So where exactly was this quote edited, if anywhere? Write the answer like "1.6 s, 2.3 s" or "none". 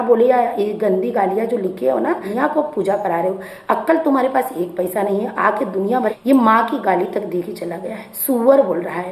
2.3 s, 6.1 s